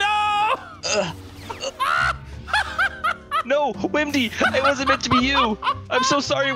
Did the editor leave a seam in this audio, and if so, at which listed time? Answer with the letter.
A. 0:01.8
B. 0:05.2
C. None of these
C